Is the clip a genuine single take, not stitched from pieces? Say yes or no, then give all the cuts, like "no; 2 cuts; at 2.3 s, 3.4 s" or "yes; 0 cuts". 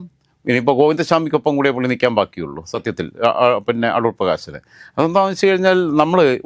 yes; 0 cuts